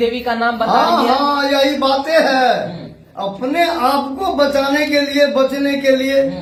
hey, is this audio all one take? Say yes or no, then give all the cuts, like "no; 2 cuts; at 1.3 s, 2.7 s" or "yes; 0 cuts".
yes; 0 cuts